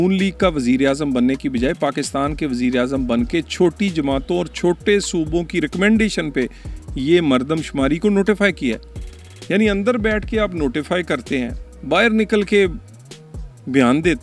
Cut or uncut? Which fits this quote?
uncut